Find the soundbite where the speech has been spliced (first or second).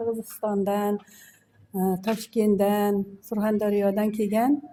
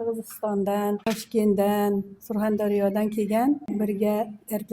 second